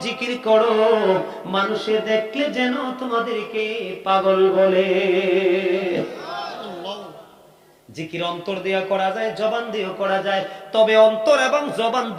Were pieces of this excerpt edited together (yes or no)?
no